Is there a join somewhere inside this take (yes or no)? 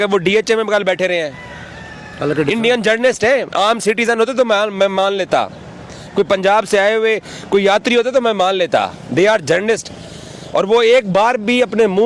no